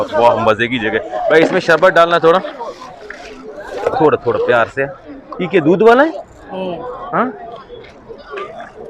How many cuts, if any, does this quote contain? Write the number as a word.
zero